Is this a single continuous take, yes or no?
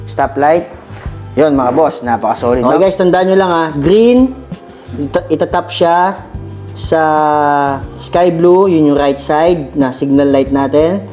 no